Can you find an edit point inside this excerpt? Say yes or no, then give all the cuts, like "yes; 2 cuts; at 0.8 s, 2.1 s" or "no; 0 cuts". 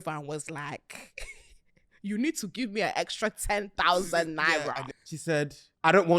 yes; 1 cut; at 5.2 s